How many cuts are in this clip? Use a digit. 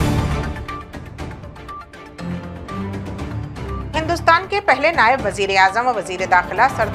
1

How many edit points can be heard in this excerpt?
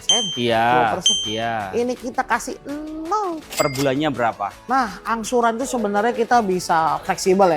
1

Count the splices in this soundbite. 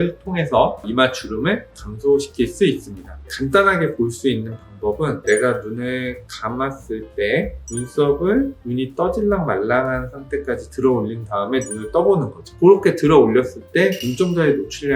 2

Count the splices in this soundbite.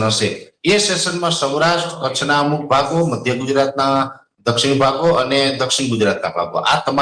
0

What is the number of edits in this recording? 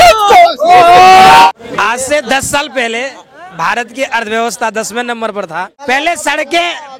2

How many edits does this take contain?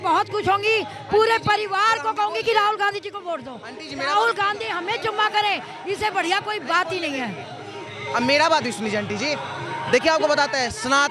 0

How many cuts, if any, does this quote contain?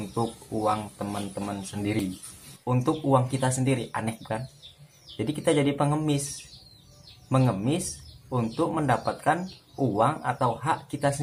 1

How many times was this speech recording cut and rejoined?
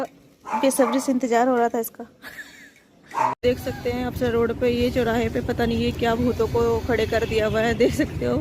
1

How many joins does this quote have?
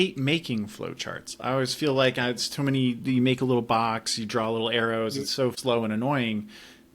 1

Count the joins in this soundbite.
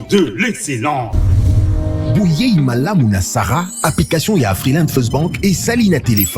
1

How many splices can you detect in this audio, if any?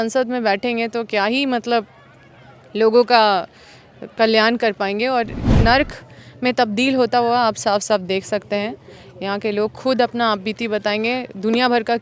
1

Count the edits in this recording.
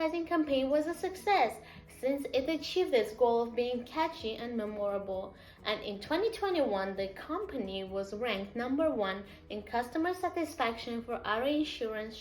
1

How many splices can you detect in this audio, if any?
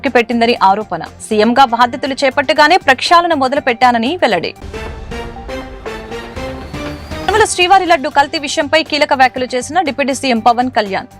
0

